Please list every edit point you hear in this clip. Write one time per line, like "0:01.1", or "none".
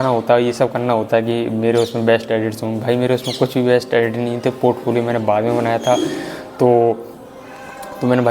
none